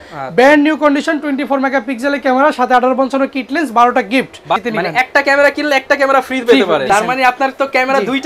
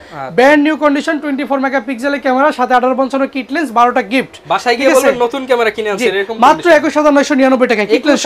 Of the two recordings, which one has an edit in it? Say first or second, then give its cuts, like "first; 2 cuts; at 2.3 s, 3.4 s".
first; 2 cuts; at 4.6 s, 6.9 s